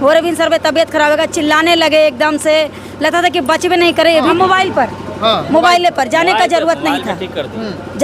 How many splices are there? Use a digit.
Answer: 1